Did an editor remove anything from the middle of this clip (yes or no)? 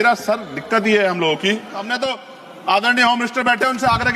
yes